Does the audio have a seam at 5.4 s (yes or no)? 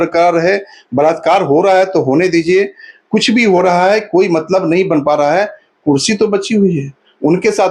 no